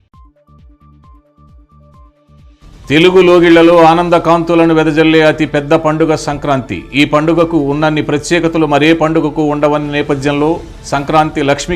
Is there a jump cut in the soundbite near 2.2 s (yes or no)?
no